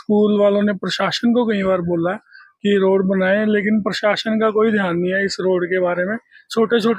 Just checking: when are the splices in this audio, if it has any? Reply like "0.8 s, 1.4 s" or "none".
none